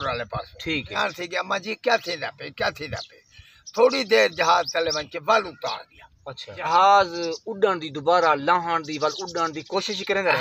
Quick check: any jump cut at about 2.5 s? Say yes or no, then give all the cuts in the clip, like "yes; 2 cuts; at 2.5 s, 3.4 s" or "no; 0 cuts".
no; 2 cuts; at 1.0 s, 6.7 s